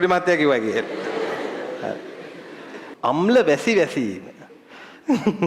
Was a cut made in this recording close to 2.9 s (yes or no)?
yes